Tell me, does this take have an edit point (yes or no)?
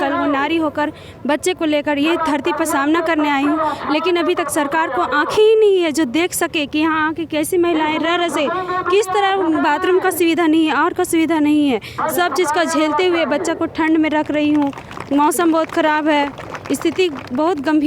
no